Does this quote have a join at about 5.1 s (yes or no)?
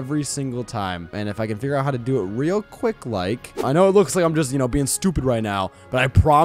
no